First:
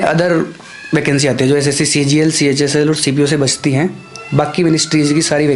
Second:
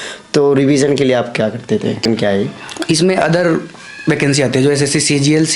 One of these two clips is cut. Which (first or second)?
second